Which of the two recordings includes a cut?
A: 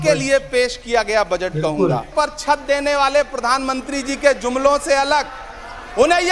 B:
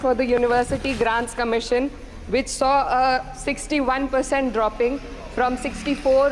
A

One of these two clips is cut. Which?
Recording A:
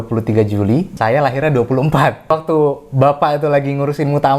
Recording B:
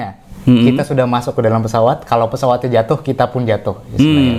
A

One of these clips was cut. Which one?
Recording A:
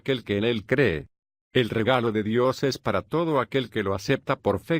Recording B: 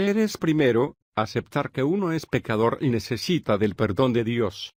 A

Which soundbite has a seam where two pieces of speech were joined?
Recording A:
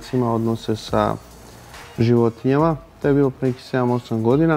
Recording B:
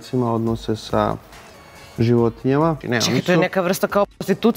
B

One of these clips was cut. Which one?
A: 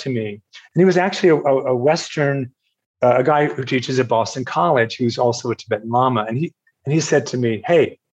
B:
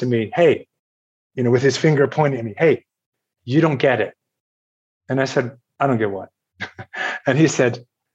B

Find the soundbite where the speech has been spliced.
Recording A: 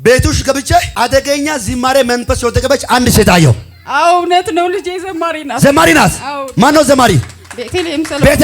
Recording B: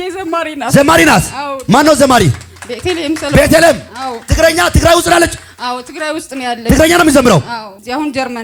A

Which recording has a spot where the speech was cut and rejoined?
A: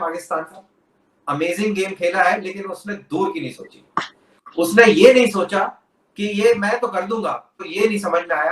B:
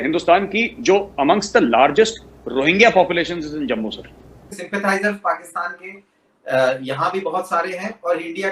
B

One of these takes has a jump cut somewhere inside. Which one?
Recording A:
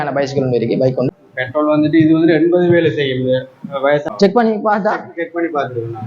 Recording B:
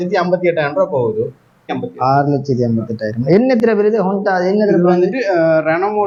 A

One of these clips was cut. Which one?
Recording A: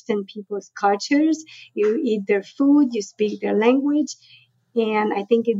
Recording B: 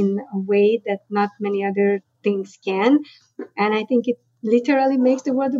B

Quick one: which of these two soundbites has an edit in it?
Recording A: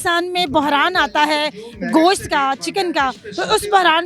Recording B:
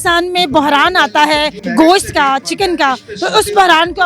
B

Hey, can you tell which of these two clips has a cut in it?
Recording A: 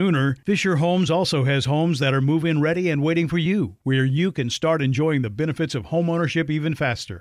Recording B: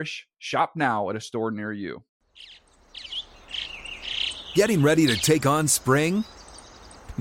B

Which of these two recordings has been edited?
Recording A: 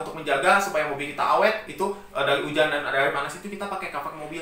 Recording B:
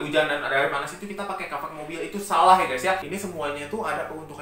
B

